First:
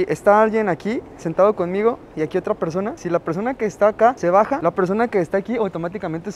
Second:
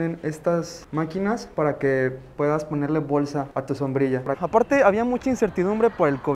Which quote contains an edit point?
second; 1 cut; at 4.4 s

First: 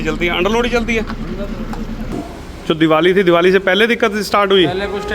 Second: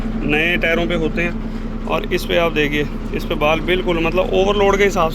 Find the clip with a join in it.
first; 1 cut; at 2.2 s

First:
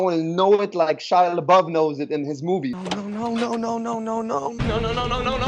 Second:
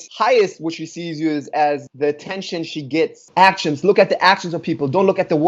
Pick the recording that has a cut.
second; 1 cut; at 3.2 s

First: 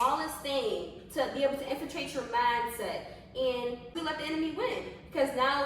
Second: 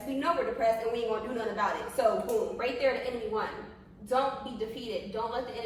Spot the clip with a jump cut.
first; 1 cut; at 3.9 s

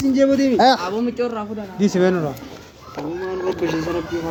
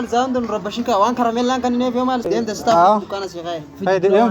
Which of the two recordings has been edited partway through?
second; 1 cut; at 2.3 s

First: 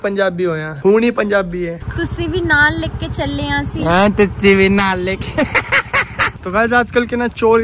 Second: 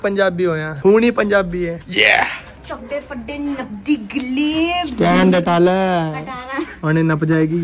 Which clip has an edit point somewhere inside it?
first; 2 cuts; at 1.8 s, 6.3 s

